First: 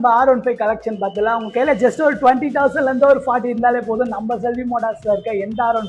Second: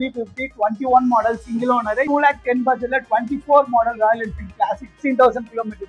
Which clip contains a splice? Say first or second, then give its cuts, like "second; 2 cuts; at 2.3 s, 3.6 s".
second; 2 cuts; at 2.1 s, 5.0 s